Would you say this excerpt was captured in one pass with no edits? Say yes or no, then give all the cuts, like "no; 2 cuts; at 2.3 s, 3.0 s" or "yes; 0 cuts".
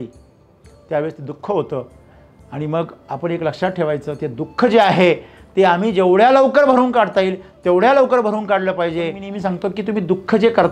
no; 1 cut; at 9.3 s